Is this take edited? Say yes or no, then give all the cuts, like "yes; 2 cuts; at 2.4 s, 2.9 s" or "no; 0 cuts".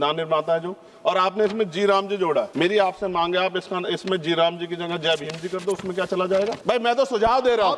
yes; 2 cuts; at 2.5 s, 6.6 s